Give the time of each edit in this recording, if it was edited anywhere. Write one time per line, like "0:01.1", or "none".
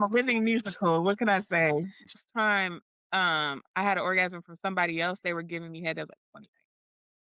0:02.2